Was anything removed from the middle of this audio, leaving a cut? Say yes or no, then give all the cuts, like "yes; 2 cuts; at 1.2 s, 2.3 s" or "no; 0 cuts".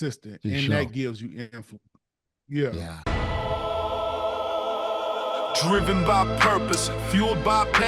yes; 1 cut; at 2.9 s